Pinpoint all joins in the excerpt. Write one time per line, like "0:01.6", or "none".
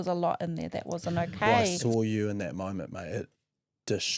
0:01.8